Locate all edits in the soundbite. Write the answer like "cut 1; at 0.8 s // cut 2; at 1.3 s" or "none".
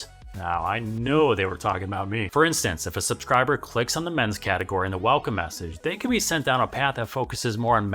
cut 1; at 2.2 s